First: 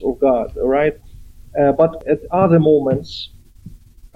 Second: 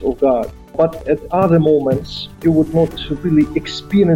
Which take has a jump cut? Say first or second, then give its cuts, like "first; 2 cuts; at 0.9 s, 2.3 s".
second; 2 cuts; at 0.7 s, 2.4 s